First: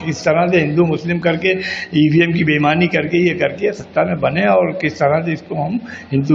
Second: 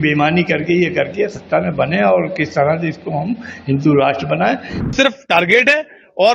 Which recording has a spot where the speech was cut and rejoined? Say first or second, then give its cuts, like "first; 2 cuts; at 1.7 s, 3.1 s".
second; 1 cut; at 4.9 s